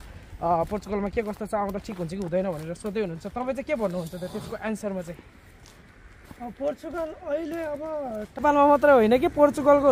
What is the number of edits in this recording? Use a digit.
1